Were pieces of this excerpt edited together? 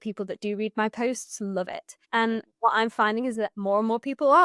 yes; 2 cuts; at 2.4 s, 3.5 s

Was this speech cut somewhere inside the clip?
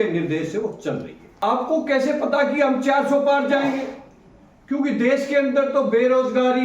yes; 1 cut; at 1.3 s

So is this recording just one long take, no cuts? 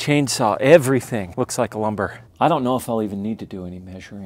no; 2 cuts; at 1.3 s, 2.1 s

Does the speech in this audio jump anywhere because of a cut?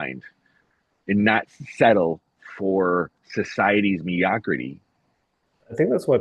no; 0 cuts

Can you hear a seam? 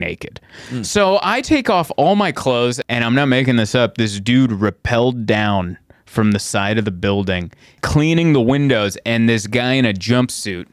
yes; 2 cuts; at 2.8 s, 7.8 s

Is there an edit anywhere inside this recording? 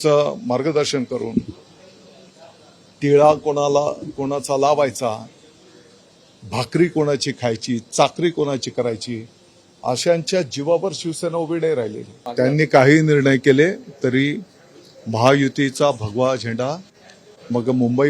yes; 1 cut; at 12.2 s

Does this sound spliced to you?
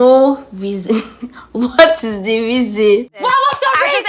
yes; 1 cut; at 3.1 s

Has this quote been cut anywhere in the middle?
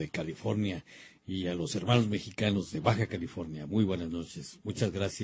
no; 0 cuts

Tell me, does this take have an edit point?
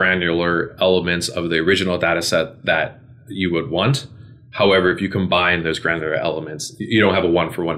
no; 0 cuts

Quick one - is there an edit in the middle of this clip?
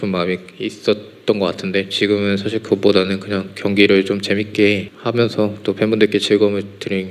yes; 1 cut; at 4.9 s

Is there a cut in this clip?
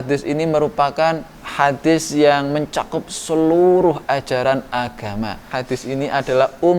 yes; 2 cuts; at 1.4 s, 5.5 s

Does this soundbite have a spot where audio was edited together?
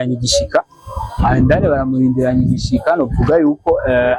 no; 0 cuts

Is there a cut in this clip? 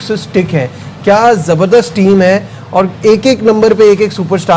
no; 0 cuts

